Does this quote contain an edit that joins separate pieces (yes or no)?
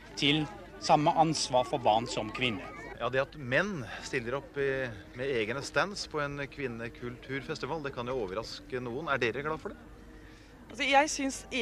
no